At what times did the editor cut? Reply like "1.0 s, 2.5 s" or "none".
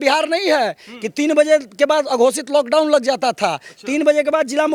none

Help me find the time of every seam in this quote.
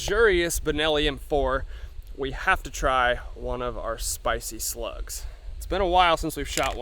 none

